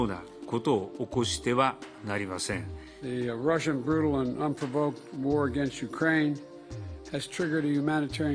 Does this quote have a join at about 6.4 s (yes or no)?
no